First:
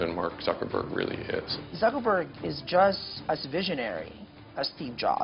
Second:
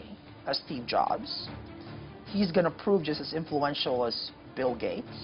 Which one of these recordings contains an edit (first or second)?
first